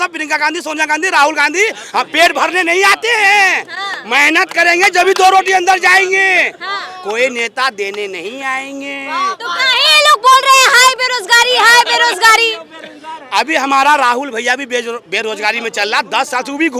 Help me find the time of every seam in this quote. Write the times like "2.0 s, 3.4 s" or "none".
none